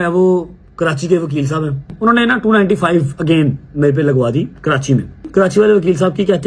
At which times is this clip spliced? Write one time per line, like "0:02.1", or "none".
0:01.9
0:05.3

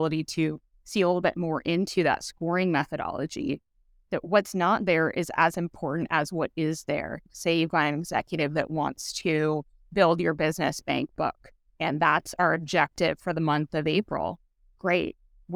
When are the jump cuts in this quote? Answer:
0:07.3

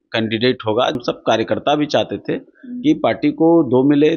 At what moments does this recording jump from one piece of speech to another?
0:01.0

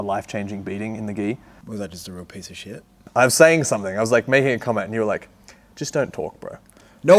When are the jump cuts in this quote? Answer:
0:01.5
0:02.9

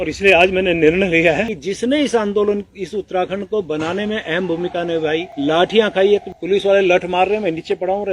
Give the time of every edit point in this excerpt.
0:01.6
0:05.3
0:06.3

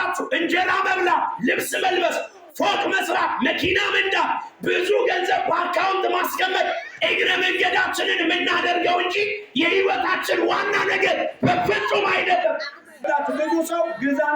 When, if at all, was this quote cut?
0:13.1

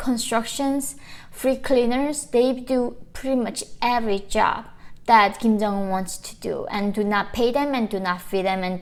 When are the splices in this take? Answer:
none

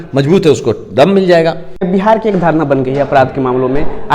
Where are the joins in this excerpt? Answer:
0:01.9

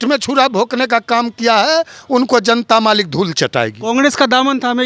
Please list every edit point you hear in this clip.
none

